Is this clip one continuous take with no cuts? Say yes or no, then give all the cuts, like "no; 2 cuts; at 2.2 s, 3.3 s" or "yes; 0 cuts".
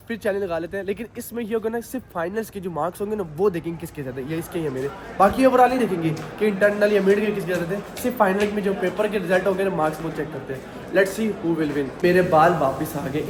yes; 0 cuts